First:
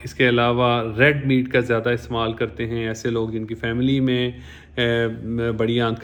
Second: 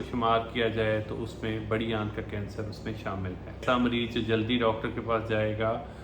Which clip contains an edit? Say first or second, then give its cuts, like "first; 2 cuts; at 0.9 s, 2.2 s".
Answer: second; 1 cut; at 3.6 s